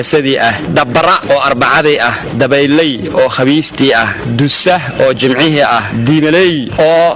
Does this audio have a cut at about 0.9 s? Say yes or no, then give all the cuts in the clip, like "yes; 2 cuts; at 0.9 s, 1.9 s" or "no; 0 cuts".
yes; 1 cut; at 0.9 s